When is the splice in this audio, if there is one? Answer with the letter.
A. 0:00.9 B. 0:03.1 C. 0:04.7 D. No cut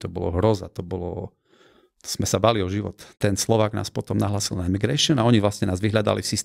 B